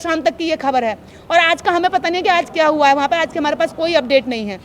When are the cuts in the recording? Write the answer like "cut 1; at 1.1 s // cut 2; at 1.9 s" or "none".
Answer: none